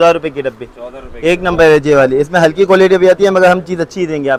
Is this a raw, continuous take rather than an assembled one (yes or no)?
yes